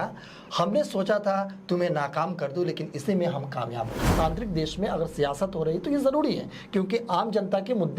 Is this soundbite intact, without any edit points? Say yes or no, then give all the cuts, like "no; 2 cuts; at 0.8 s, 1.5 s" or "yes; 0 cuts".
no; 1 cut; at 4.1 s